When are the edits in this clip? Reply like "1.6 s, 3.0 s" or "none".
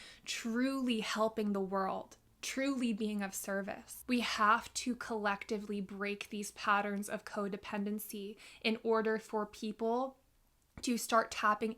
3.9 s